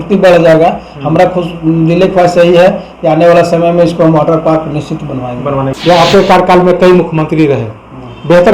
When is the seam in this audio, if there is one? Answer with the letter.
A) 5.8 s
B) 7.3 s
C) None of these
A